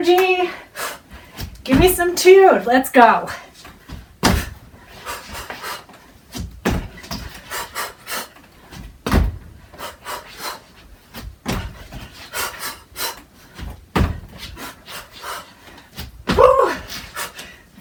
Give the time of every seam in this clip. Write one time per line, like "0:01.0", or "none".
none